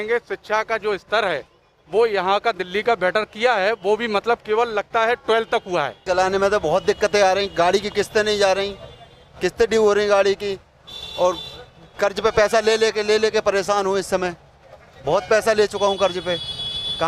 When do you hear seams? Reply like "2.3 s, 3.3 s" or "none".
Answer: 6.0 s